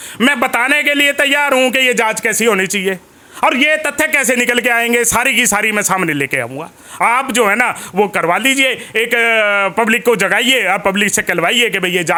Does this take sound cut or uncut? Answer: uncut